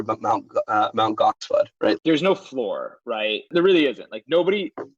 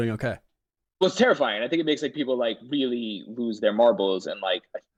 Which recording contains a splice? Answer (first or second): first